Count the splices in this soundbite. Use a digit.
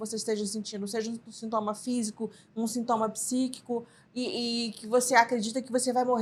0